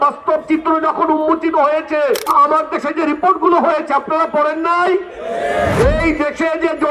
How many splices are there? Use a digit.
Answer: 2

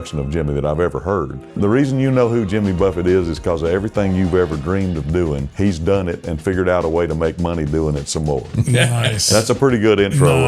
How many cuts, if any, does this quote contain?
2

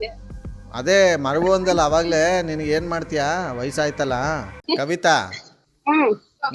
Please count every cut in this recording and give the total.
1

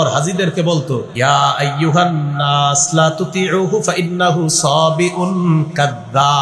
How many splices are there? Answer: 1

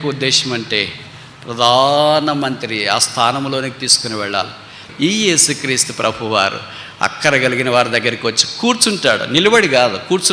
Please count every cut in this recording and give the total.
1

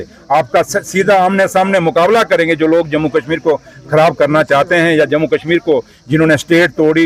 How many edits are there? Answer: 0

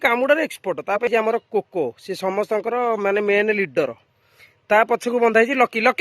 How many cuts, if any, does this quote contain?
1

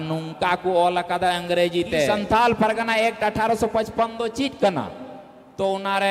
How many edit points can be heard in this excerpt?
1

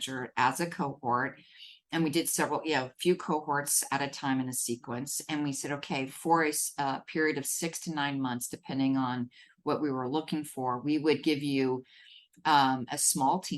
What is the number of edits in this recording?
0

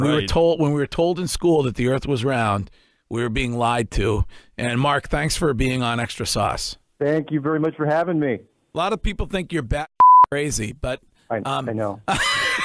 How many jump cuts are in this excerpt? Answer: 1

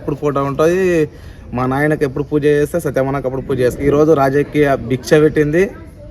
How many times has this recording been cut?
1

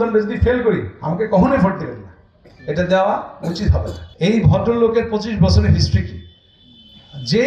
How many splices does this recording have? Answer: 1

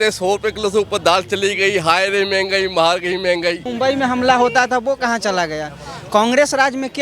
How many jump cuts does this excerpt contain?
1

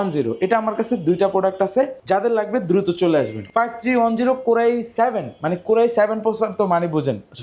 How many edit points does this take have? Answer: 2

